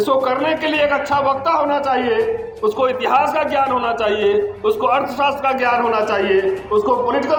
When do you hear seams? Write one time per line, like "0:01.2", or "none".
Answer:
none